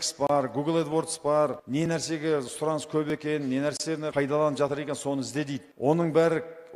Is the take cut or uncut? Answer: cut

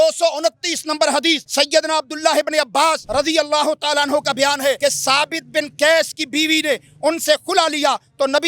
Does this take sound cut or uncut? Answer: cut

